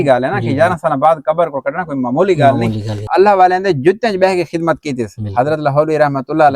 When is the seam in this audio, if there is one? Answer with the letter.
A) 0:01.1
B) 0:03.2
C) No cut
B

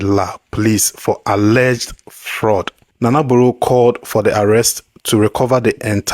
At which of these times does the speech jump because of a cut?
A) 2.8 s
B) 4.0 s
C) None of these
A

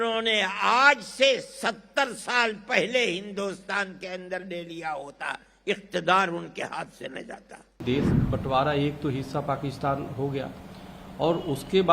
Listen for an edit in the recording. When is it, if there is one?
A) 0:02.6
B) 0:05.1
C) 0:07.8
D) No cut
C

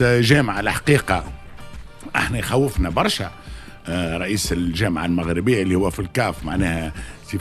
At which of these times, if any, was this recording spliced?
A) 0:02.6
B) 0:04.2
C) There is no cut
C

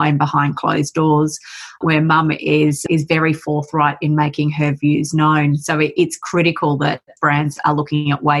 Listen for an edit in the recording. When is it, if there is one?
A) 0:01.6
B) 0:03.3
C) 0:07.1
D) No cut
C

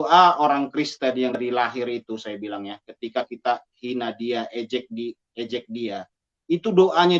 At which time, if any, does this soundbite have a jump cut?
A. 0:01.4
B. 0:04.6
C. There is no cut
A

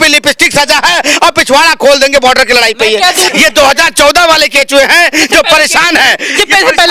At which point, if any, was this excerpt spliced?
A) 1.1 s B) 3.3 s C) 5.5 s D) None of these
B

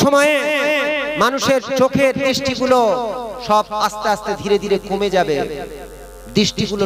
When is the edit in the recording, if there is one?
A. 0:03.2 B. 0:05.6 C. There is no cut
C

